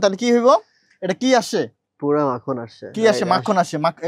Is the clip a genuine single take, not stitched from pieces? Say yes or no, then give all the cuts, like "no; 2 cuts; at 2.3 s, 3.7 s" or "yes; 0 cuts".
yes; 0 cuts